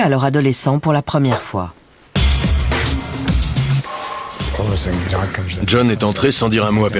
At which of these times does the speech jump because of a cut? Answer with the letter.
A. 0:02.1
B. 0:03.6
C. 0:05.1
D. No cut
A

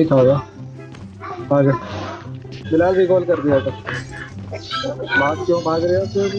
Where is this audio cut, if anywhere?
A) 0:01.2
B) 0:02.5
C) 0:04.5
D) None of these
B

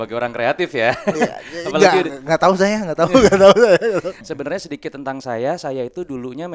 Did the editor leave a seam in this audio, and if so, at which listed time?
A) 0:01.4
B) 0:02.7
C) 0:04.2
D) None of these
C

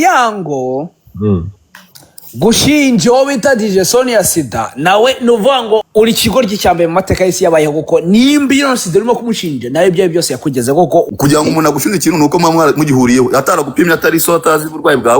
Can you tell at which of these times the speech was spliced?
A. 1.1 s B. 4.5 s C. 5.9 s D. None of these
C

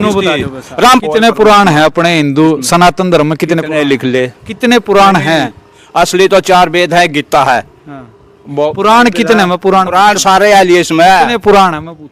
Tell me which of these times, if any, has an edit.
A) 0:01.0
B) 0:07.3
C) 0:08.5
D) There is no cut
A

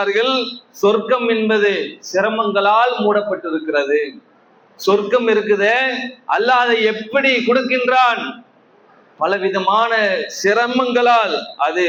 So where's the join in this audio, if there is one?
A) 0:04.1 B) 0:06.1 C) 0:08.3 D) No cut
D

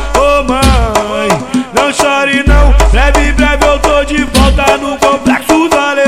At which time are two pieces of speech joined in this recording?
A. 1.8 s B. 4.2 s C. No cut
B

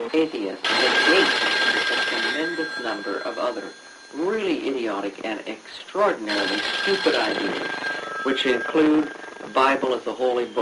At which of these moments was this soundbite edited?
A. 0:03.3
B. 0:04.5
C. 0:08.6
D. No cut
A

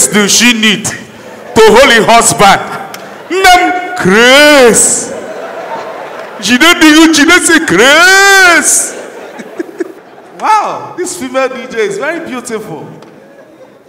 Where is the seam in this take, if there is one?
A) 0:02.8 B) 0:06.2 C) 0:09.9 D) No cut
C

